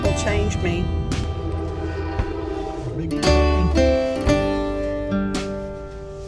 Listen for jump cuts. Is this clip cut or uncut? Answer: uncut